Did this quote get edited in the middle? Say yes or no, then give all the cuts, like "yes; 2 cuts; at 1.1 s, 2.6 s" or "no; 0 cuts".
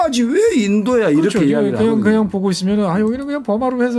no; 0 cuts